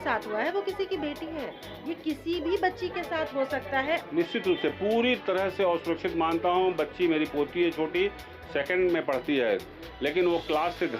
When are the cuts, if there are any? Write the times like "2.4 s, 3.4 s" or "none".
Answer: 4.0 s